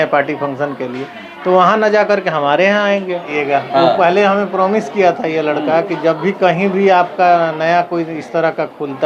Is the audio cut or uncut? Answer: cut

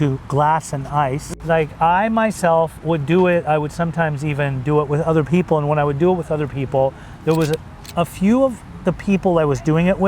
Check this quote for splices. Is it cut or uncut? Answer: cut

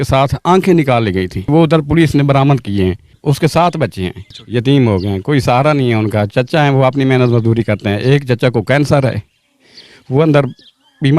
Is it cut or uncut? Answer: cut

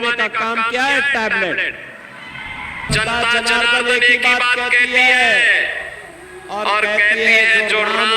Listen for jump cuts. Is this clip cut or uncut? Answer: cut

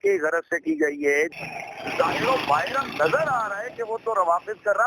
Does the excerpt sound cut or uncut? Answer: cut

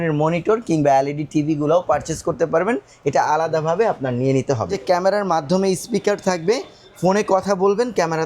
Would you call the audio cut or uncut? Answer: cut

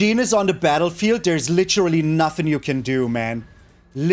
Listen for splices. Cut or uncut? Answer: uncut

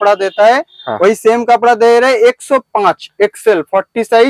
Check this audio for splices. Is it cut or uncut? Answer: uncut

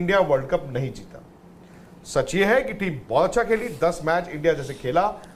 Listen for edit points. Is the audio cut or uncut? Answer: uncut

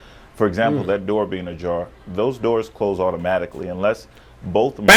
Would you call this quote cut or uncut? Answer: uncut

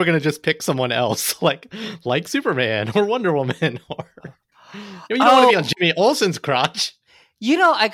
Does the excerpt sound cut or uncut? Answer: uncut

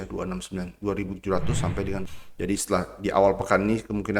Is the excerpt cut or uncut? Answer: cut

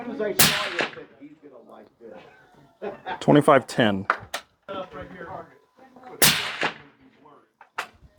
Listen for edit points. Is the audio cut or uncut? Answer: cut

